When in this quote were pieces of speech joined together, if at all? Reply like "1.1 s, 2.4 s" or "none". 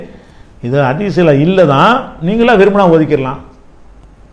none